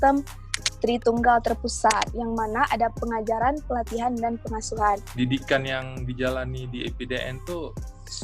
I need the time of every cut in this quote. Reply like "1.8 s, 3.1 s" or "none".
2.1 s, 5.1 s